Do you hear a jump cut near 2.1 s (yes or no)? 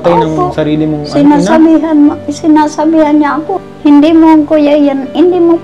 no